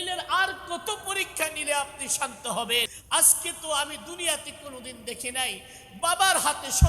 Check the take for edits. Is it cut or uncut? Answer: cut